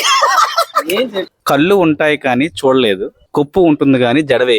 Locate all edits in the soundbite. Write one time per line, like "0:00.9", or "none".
0:01.3
0:03.2